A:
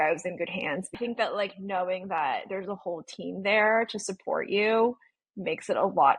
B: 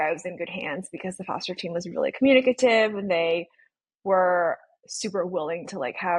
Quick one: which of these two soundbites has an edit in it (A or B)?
A